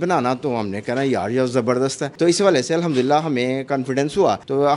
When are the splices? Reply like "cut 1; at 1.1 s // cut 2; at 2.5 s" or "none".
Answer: none